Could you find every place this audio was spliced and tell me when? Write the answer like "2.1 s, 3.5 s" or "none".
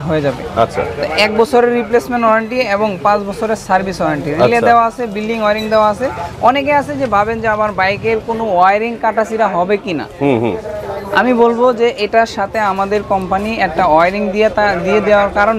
none